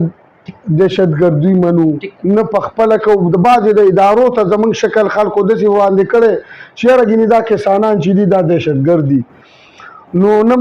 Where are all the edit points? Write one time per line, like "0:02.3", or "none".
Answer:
none